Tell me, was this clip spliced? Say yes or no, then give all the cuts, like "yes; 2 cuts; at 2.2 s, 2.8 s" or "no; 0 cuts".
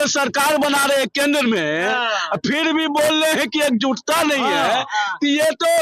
no; 0 cuts